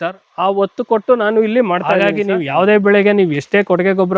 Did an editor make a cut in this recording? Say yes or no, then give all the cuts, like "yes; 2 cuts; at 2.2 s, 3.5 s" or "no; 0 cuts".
yes; 1 cut; at 2.0 s